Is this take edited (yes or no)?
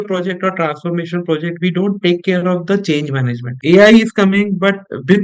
yes